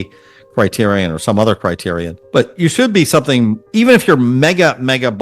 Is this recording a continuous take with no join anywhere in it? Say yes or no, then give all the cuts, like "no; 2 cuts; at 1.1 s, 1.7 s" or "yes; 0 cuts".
no; 2 cuts; at 2.1 s, 3.6 s